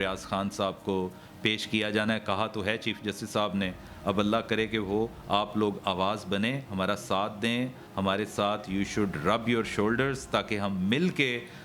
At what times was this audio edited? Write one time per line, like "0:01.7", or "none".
none